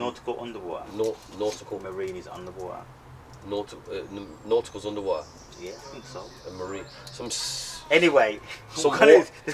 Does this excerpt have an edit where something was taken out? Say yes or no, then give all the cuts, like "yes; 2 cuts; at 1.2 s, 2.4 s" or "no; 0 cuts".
no; 0 cuts